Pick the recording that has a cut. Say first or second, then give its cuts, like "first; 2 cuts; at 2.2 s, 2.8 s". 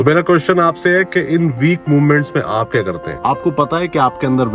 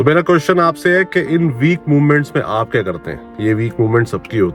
first; 1 cut; at 3.1 s